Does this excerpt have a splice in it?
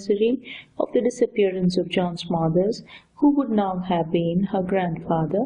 yes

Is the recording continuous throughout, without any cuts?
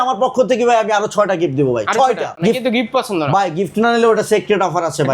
no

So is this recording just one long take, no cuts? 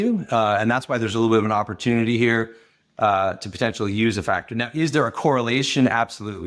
yes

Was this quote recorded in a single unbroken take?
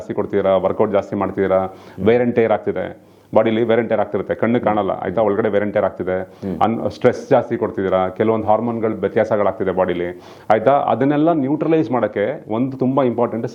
yes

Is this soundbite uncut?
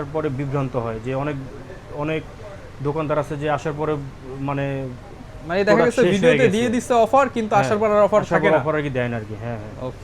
yes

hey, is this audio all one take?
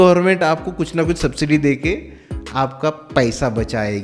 yes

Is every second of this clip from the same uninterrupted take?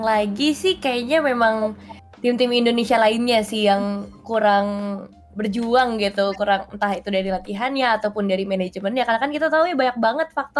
yes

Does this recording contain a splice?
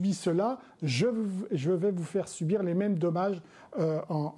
no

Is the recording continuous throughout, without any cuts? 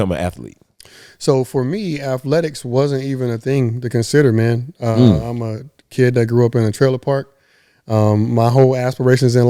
yes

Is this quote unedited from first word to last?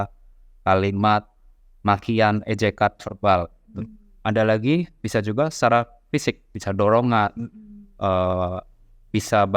no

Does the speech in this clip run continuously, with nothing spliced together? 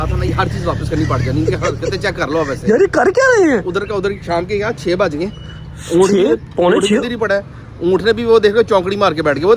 yes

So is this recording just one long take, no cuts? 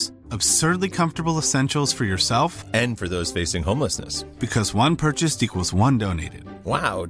yes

